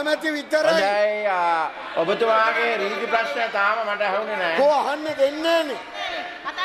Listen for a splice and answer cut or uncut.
uncut